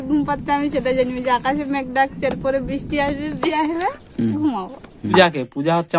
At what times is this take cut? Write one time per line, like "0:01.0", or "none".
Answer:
0:03.5
0:05.1